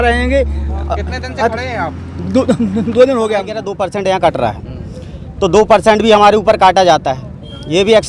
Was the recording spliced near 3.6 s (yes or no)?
yes